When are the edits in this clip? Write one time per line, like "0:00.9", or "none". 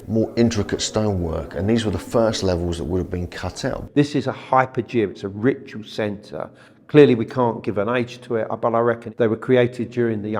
0:03.8
0:09.1